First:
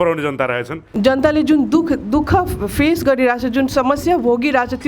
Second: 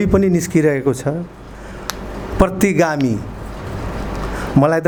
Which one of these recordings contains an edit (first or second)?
first